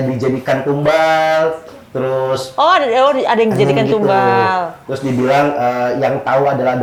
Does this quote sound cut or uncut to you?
uncut